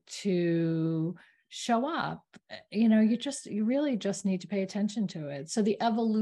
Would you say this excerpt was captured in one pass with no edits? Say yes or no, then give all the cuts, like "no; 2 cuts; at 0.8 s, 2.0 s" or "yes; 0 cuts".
yes; 0 cuts